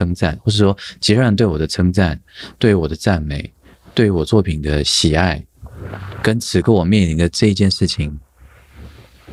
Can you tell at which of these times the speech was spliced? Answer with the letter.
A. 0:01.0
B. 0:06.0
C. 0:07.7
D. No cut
D